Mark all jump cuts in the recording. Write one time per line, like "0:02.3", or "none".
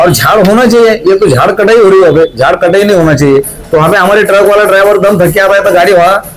none